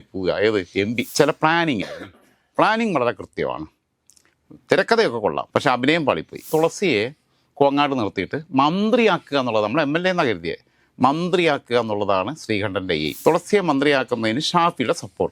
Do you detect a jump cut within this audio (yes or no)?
yes